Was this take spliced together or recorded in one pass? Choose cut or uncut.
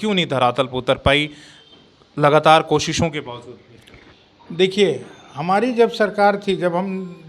uncut